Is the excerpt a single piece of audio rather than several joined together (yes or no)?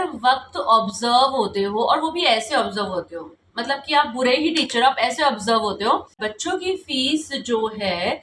no